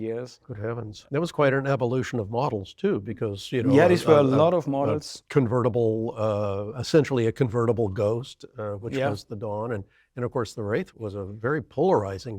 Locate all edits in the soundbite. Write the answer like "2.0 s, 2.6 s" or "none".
10.9 s